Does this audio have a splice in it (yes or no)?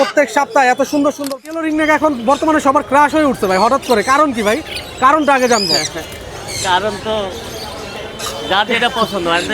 yes